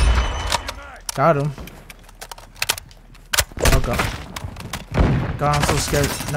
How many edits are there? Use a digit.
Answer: 1